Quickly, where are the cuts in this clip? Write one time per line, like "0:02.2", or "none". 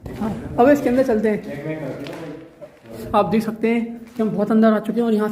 0:03.0